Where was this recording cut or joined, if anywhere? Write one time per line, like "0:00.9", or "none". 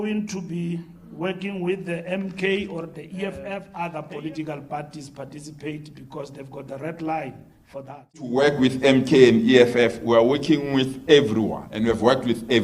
0:03.7
0:08.3
0:11.6